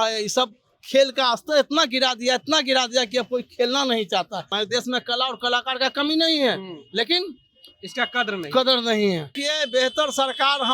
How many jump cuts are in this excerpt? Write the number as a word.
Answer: two